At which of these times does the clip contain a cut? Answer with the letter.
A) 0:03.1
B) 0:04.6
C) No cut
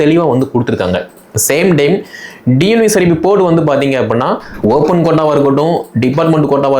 B